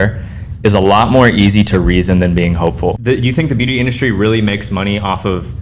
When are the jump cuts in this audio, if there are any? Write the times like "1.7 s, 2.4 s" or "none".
3.0 s